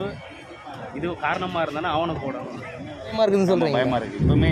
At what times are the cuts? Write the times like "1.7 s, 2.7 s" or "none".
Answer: 3.1 s